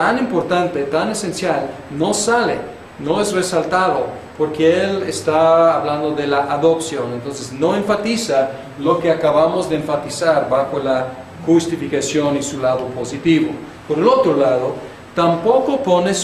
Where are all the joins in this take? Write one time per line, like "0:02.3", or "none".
0:11.9